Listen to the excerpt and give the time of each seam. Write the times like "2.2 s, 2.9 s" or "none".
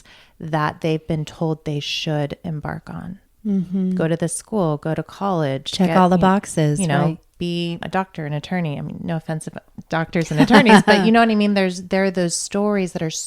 3.2 s, 7.9 s